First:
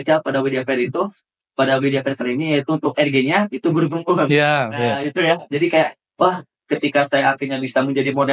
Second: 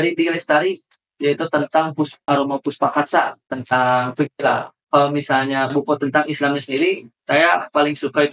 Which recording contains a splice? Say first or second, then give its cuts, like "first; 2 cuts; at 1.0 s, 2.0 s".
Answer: second; 3 cuts; at 2.2 s, 3.4 s, 4.7 s